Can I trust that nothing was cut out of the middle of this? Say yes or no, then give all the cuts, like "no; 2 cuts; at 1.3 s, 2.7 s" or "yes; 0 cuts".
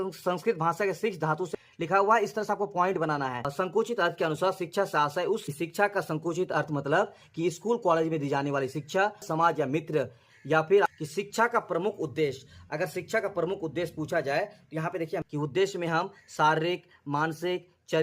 no; 6 cuts; at 1.5 s, 3.5 s, 5.5 s, 9.2 s, 10.9 s, 15.3 s